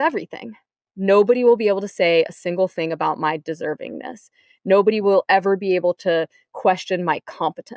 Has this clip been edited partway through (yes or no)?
no